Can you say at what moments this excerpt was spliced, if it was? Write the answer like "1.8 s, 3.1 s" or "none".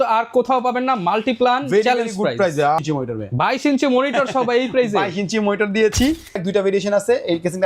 2.8 s, 6.4 s